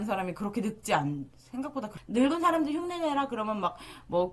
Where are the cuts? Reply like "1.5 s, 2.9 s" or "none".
2.0 s